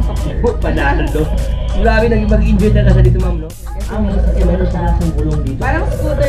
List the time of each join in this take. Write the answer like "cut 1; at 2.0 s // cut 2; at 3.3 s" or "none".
cut 1; at 3.3 s